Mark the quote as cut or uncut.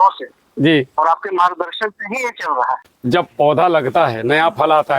cut